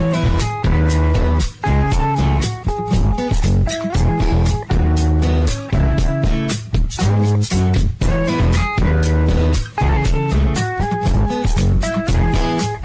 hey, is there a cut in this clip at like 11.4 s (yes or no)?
yes